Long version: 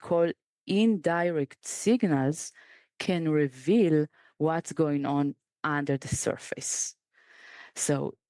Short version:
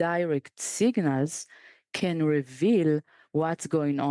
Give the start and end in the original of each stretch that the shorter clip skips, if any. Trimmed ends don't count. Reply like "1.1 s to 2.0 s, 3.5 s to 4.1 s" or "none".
none